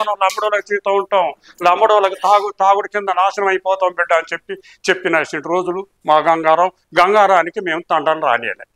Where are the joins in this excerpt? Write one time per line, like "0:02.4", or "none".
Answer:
none